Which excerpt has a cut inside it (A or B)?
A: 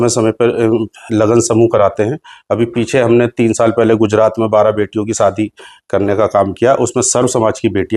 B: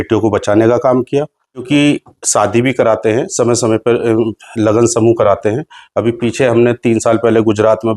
B